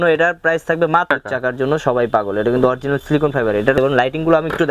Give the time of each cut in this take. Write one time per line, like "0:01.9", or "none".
0:01.1
0:03.8